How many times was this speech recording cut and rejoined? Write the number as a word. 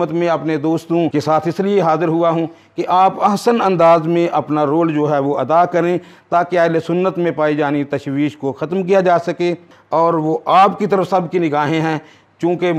one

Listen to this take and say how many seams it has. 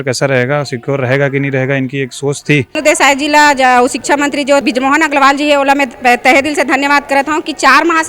two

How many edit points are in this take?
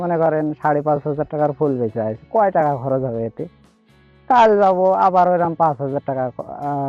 zero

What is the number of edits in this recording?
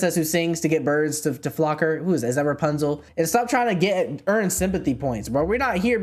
one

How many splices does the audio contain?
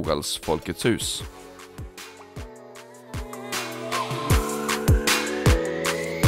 one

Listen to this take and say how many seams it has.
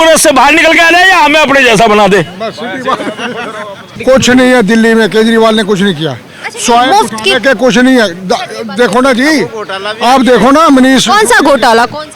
one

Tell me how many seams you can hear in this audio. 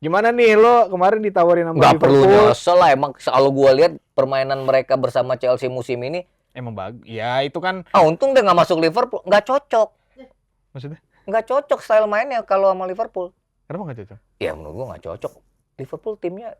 zero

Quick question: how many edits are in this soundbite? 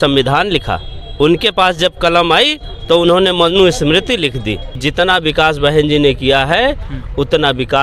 one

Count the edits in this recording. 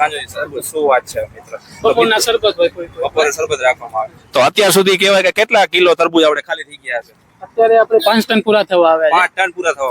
zero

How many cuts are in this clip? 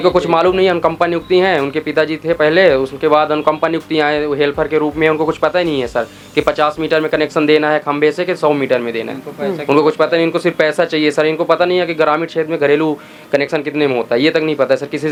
zero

